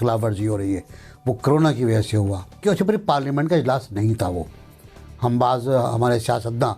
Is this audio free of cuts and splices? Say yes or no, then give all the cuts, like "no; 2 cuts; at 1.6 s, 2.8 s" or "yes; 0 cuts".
no; 1 cut; at 2.6 s